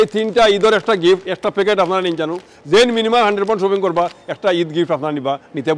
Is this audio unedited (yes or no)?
yes